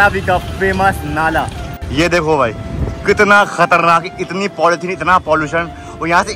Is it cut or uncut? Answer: uncut